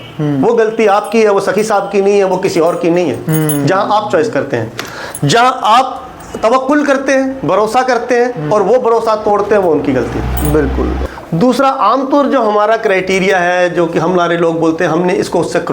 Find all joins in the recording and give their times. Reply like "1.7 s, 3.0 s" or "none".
11.0 s